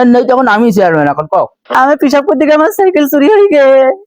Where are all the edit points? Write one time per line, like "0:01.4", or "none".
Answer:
0:01.6